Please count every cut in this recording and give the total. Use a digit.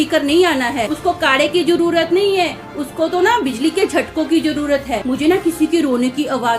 2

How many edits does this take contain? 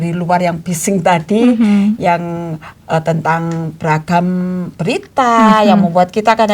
0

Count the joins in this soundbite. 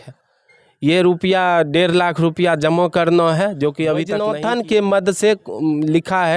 1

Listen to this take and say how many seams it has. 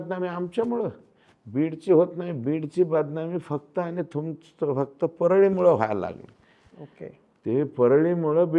0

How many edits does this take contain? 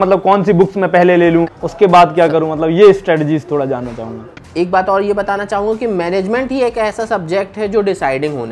2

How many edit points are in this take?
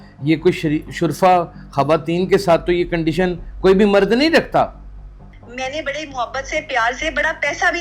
1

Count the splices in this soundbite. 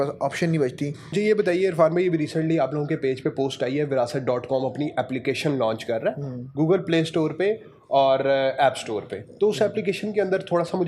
1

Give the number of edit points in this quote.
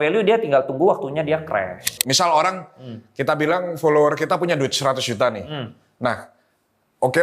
1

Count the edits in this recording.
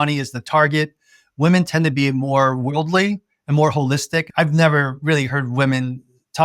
1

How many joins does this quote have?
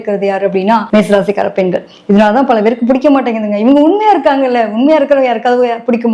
0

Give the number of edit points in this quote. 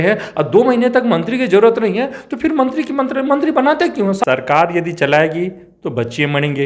1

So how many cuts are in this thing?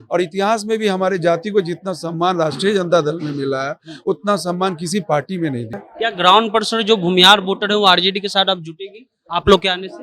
1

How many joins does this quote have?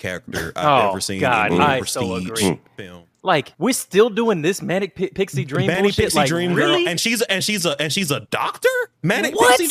1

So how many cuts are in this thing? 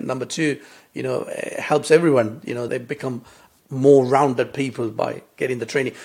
1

